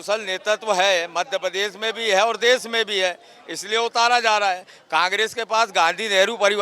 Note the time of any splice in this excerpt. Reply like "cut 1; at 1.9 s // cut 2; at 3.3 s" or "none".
none